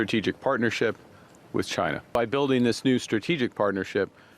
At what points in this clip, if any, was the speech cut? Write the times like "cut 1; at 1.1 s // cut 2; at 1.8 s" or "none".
cut 1; at 2.1 s